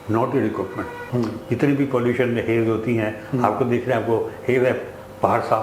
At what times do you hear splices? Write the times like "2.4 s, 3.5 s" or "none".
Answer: 0.9 s

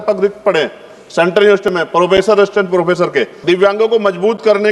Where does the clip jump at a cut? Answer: 3.3 s

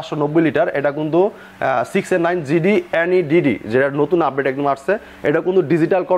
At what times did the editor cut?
none

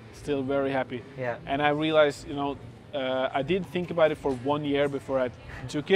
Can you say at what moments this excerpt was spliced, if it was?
none

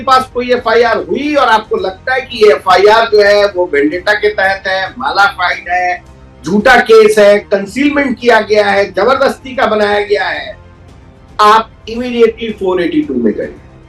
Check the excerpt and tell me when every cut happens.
none

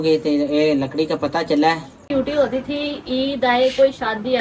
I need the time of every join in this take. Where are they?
2.1 s

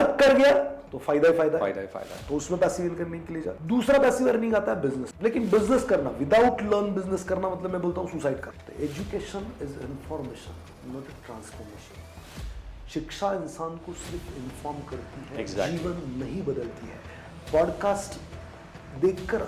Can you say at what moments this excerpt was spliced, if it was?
3.6 s, 5.1 s, 8.6 s

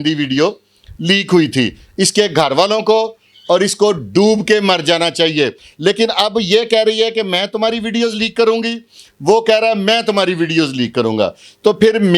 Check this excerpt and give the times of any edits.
5.6 s

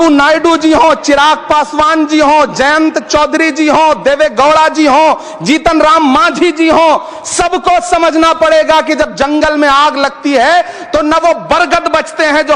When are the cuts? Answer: none

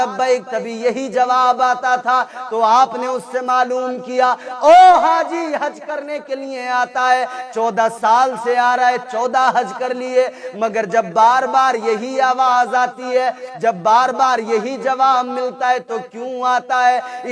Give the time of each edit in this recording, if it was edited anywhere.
none

